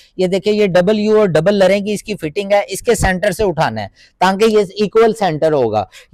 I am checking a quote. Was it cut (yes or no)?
no